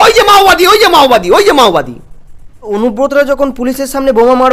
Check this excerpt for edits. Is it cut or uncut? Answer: cut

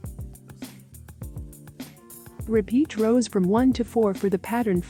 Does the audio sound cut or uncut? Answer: uncut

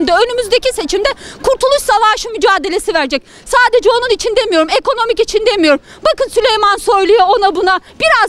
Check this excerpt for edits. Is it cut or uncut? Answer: uncut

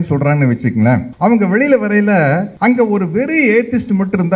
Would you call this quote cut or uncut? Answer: cut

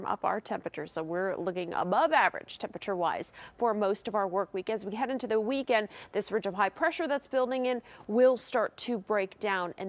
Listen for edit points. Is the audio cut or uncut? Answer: uncut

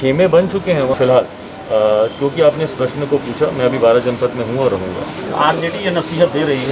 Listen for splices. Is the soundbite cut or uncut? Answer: cut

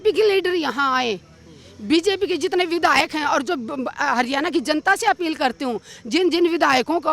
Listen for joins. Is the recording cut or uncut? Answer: uncut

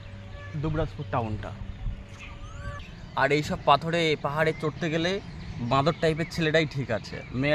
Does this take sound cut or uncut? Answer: cut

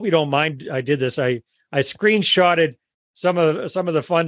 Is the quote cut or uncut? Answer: uncut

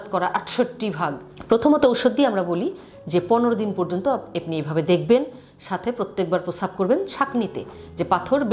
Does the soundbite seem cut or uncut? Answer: cut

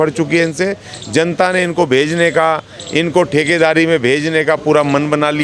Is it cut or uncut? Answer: uncut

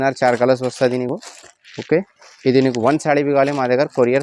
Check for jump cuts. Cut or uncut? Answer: uncut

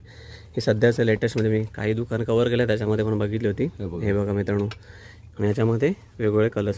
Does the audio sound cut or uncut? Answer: uncut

